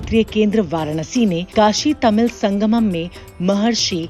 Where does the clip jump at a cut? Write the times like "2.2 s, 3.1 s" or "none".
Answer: 1.4 s